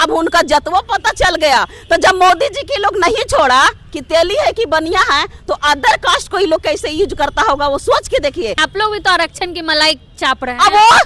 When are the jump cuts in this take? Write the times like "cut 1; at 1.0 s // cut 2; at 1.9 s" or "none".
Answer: cut 1; at 8.6 s